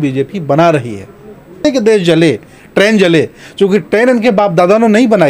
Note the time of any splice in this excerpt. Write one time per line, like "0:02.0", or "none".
0:01.6